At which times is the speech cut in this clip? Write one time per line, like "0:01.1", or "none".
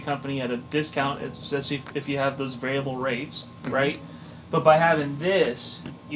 none